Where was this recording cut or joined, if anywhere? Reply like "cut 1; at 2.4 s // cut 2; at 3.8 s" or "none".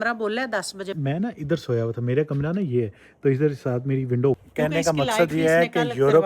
cut 1; at 1.0 s // cut 2; at 4.5 s